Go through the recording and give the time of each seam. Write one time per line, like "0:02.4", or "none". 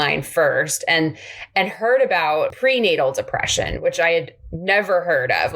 0:02.5